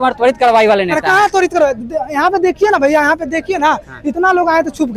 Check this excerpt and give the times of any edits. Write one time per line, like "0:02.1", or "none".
none